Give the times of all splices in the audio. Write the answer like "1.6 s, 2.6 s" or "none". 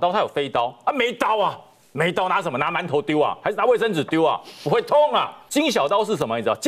5.4 s